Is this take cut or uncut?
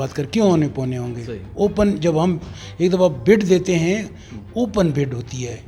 uncut